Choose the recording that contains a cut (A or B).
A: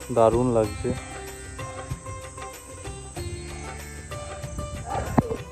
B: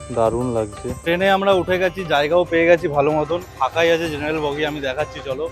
B